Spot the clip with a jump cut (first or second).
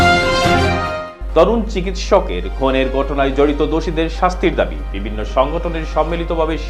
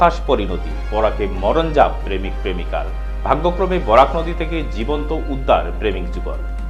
first